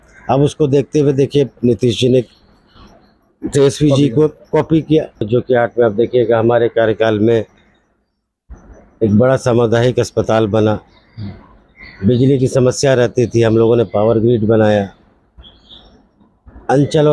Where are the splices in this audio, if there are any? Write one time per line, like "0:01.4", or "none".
0:05.3